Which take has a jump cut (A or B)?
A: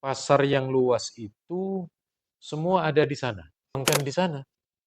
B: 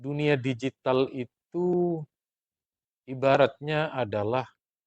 A